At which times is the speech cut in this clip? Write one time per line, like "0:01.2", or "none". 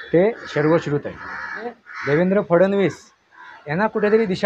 0:01.9